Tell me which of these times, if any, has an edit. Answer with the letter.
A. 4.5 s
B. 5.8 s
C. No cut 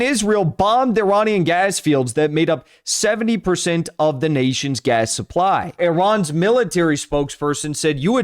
B